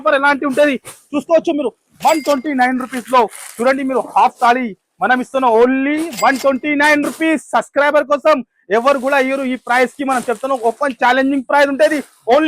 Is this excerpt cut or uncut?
uncut